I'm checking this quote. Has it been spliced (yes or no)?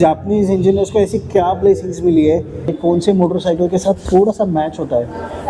yes